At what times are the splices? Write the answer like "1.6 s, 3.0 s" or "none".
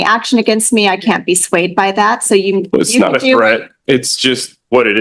none